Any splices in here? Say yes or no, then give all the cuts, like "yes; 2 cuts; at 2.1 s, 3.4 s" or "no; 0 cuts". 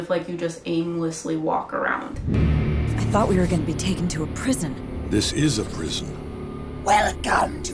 yes; 1 cut; at 2.2 s